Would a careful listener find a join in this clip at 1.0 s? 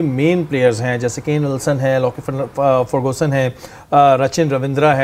no; 0 cuts

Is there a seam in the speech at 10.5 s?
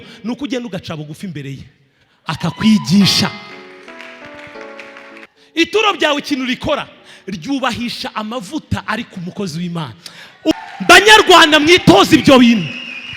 yes; 2 cuts; at 5.3 s, 10.5 s

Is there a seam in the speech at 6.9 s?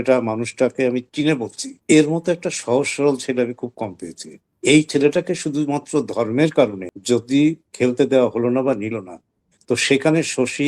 yes; 1 cut; at 6.9 s

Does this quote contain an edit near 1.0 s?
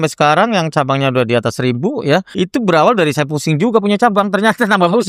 no; 1 cut; at 2.3 s

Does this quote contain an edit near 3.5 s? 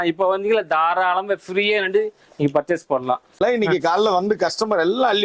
yes; 1 cut; at 3.5 s

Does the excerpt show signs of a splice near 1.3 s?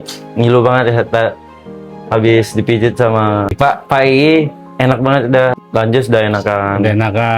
no; 2 cuts; at 3.5 s, 5.6 s

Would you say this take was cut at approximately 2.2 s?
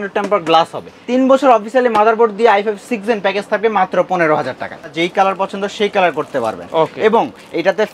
no; 2 cuts; at 0.9 s, 4.9 s

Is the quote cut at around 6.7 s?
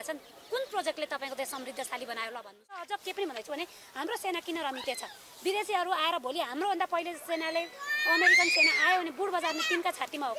no; 1 cut; at 3.0 s

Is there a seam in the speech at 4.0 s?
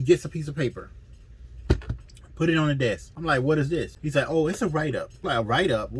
yes; 3 cuts; at 3.1 s, 4.0 s, 5.1 s

